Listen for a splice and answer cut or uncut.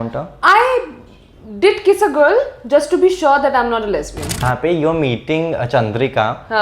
cut